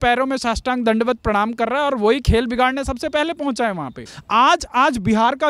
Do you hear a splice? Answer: yes; 1 cut; at 4.1 s

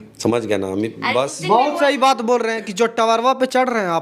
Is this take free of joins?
yes; 0 cuts

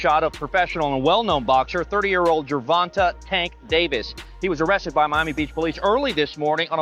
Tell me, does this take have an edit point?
no; 0 cuts

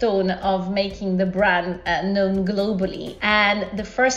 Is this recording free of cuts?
no; 1 cut; at 3.1 s

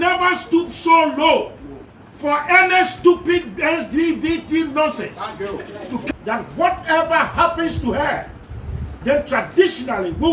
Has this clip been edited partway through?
yes; 1 cut; at 6.0 s

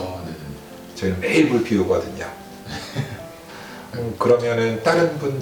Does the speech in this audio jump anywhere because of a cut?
no; 0 cuts

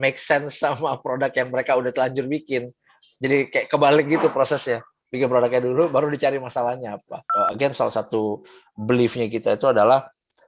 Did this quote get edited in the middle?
yes; 1 cut; at 7.2 s

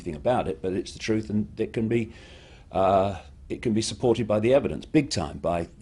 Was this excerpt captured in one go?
yes; 0 cuts

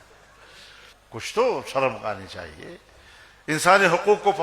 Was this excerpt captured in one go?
no; 1 cut; at 0.9 s

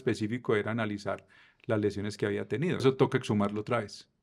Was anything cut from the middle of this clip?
yes; 1 cut; at 2.8 s

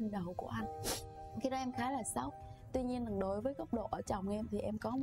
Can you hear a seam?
yes; 1 cut; at 2.3 s

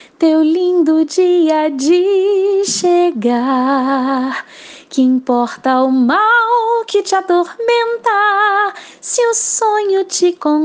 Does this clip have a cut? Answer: no; 0 cuts

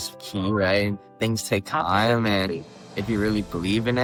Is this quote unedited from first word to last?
yes; 0 cuts

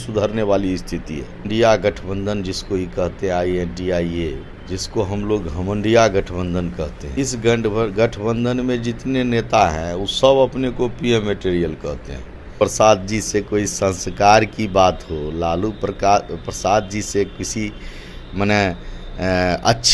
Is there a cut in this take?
yes; 4 cuts; at 1.4 s, 4.5 s, 7.0 s, 12.5 s

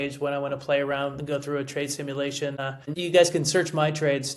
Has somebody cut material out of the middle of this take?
yes; 1 cut; at 2.8 s

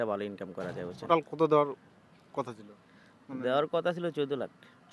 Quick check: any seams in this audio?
yes; 1 cut; at 1.1 s

